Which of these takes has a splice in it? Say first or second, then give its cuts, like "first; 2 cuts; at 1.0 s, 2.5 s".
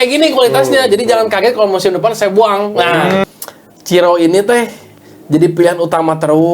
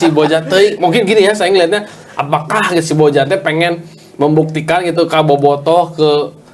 first; 1 cut; at 3.2 s